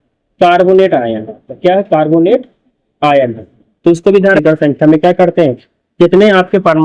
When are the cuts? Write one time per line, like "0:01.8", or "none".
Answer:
0:04.4